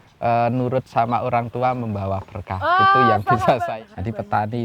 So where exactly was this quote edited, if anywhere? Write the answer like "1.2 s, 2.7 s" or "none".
3.6 s